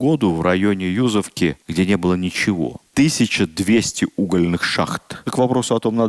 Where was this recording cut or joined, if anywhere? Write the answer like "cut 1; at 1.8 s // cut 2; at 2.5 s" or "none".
cut 1; at 1.6 s // cut 2; at 2.8 s // cut 3; at 5.2 s

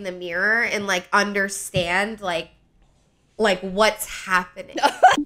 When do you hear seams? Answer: none

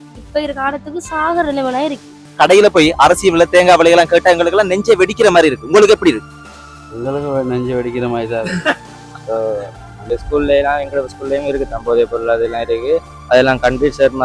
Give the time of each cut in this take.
cut 1; at 2.2 s // cut 2; at 10.1 s

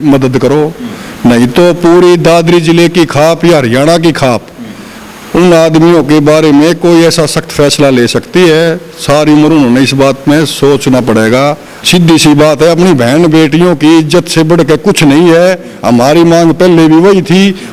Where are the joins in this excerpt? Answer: cut 1; at 11.7 s

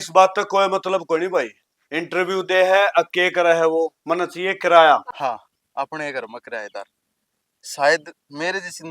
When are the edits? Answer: cut 1; at 5.1 s

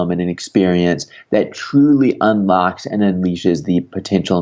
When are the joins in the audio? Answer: none

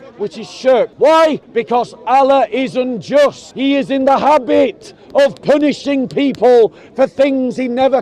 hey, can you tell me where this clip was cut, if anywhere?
cut 1; at 1.4 s // cut 2; at 3.5 s

